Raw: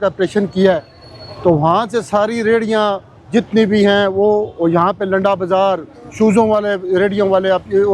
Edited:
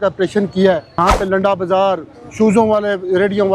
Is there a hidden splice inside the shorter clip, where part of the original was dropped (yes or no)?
yes